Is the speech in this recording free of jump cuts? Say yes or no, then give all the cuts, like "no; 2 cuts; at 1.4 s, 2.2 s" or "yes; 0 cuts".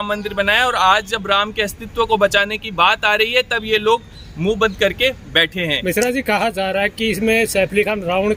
yes; 0 cuts